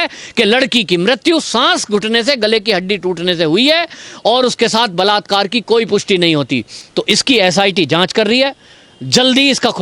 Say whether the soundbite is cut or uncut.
cut